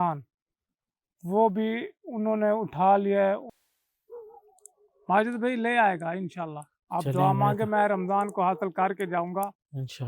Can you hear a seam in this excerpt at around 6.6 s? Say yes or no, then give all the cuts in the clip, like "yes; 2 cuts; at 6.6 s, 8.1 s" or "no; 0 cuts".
no; 1 cut; at 3.5 s